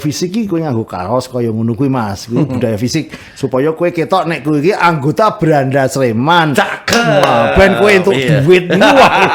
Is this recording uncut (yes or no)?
yes